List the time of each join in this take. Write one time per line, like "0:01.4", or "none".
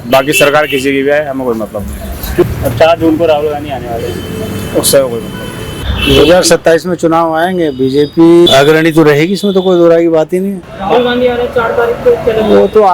0:02.4
0:05.7
0:10.7